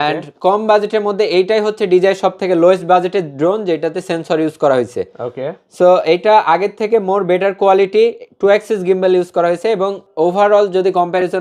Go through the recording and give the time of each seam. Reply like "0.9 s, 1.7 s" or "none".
10.0 s